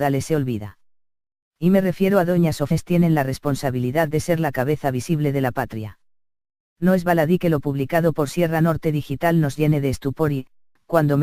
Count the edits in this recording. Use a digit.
0